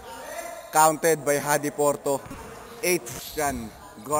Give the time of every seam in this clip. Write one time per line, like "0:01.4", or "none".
0:03.2